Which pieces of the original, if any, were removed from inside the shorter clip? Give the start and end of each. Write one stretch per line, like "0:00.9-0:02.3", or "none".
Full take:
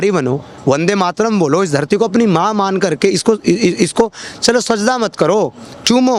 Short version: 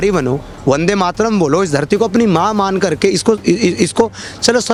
none